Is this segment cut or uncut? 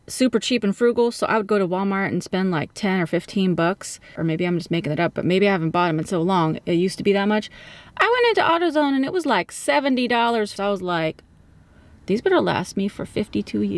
cut